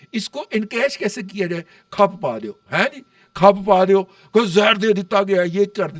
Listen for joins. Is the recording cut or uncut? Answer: uncut